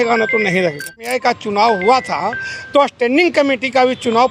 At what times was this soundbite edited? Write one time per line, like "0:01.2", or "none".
0:01.0